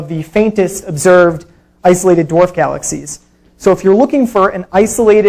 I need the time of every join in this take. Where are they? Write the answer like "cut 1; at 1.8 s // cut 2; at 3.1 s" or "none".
cut 1; at 3.8 s